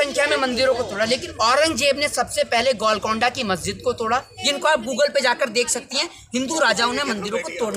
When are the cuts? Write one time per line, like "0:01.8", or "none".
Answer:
0:01.3
0:04.3